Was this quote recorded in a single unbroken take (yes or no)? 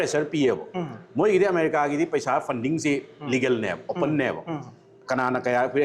yes